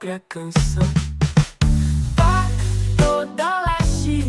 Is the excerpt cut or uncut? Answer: uncut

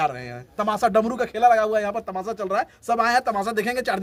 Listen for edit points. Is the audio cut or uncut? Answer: uncut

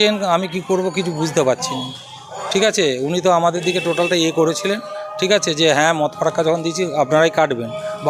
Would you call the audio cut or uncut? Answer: uncut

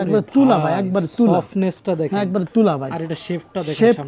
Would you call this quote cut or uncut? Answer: uncut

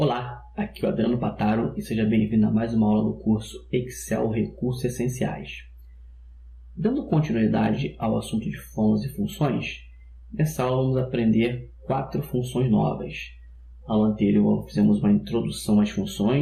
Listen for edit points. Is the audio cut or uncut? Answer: uncut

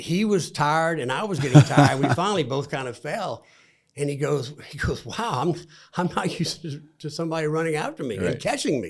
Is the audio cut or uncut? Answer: uncut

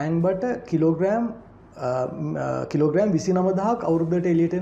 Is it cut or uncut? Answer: uncut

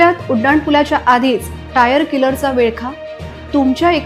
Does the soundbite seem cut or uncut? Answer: uncut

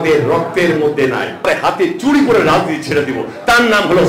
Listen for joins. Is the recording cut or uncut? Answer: cut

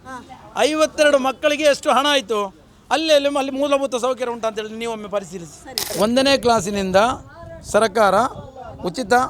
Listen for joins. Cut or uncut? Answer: cut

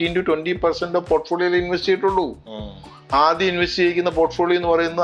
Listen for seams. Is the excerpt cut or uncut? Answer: uncut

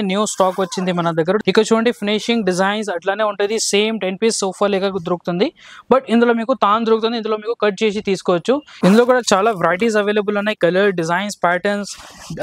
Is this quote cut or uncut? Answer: cut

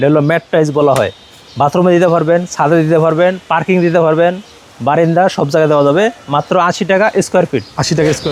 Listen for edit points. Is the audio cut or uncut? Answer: uncut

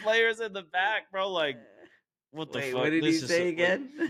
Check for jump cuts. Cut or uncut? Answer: uncut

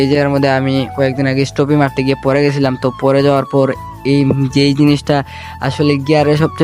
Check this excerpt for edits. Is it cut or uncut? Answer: uncut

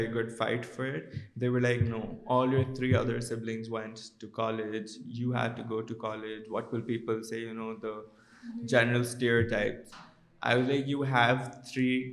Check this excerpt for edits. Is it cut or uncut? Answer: uncut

